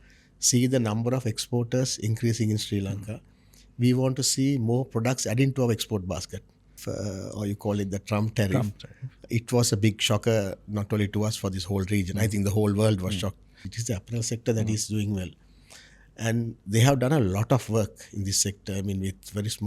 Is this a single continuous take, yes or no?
no